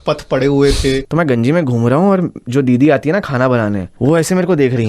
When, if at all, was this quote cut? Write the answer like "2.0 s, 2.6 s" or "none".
1.1 s, 3.9 s